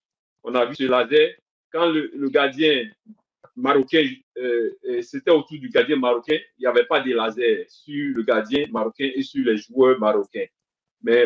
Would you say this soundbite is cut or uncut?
cut